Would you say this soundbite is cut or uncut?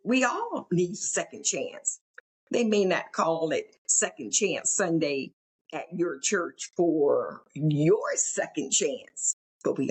uncut